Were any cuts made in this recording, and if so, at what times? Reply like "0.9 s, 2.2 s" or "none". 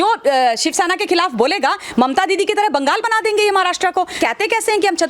4.1 s